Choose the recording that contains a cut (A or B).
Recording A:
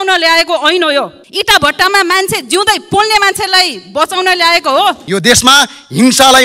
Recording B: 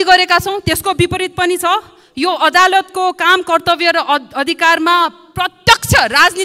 A